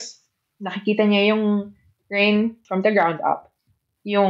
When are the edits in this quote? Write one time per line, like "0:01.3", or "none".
0:02.6